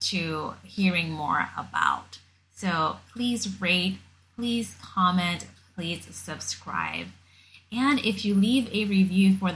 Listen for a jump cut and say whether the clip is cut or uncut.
uncut